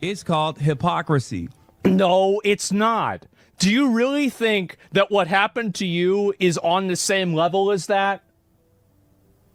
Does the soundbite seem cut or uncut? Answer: uncut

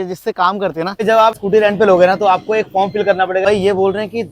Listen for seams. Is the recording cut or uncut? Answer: cut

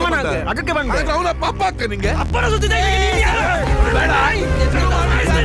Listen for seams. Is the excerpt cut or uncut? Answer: cut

